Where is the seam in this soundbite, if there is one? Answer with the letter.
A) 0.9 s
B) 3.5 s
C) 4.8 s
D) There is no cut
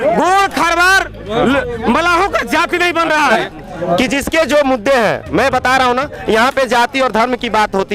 B